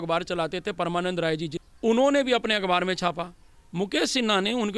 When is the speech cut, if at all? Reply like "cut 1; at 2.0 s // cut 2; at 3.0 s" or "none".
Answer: cut 1; at 1.6 s